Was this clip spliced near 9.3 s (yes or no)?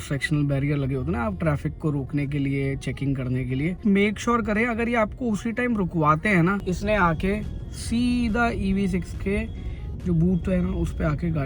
no